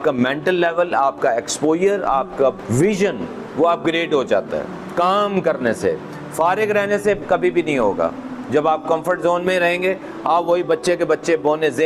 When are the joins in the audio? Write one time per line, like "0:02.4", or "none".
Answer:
none

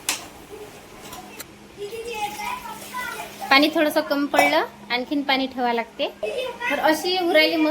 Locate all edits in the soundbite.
0:01.5

